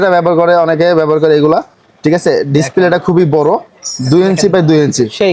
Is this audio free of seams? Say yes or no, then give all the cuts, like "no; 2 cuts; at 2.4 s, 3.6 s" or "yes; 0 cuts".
yes; 0 cuts